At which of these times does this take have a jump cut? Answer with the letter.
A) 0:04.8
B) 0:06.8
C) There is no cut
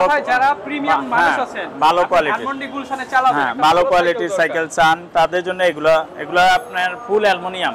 C